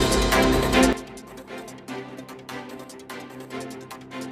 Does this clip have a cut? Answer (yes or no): yes